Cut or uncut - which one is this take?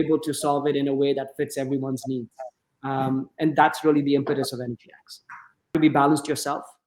cut